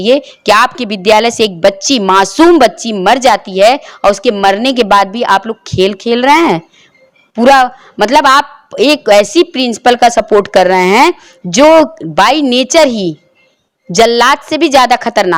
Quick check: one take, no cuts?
yes; 0 cuts

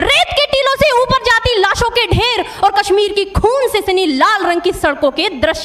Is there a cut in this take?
no; 0 cuts

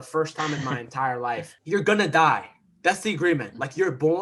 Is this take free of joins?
no; 1 cut; at 1.5 s

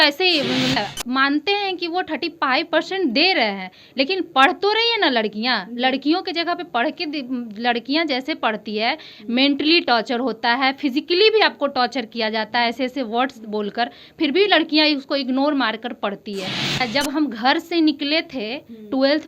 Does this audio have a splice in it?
yes; 2 cuts; at 0.8 s, 16.8 s

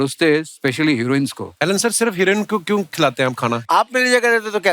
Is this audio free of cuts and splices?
no; 2 cuts; at 1.5 s, 3.6 s

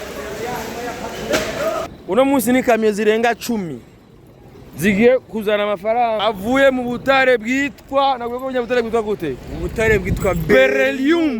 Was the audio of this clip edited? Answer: yes; 1 cut; at 1.9 s

